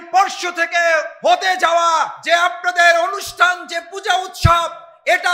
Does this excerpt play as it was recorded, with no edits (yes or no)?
no